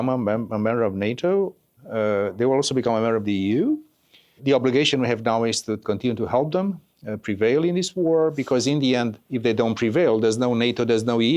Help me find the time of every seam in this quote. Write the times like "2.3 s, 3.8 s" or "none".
1.7 s, 4.4 s, 5.8 s